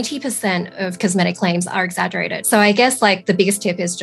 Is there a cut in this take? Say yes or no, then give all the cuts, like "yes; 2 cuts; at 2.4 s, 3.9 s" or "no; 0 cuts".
yes; 1 cut; at 2.4 s